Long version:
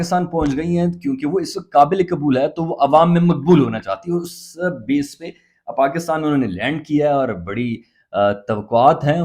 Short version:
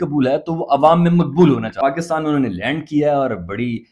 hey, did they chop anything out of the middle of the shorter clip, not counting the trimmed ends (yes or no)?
yes